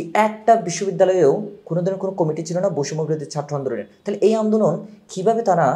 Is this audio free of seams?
yes; 0 cuts

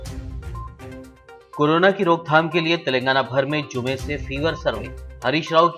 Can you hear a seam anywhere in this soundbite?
yes; 1 cut; at 1.0 s

